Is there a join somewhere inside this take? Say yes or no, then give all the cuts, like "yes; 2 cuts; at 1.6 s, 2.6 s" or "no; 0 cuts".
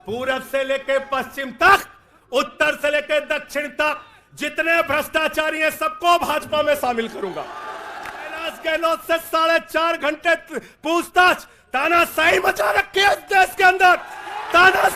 yes; 1 cut; at 8.5 s